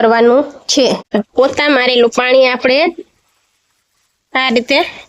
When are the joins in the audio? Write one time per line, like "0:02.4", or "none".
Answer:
0:01.0